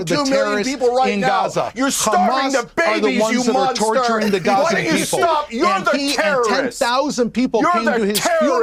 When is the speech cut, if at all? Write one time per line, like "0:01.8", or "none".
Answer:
none